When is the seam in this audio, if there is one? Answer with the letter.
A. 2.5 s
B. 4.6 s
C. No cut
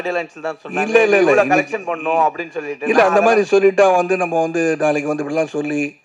C